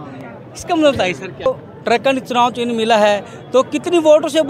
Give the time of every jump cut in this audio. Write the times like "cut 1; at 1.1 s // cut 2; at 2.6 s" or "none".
cut 1; at 1.5 s